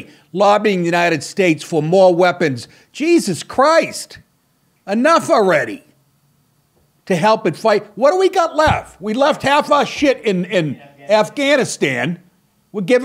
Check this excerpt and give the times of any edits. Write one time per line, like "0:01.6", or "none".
none